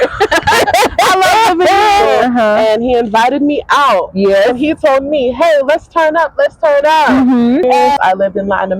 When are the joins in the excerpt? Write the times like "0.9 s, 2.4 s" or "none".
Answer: 2.1 s, 8.0 s

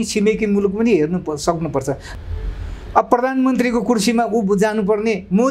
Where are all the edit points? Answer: 2.1 s

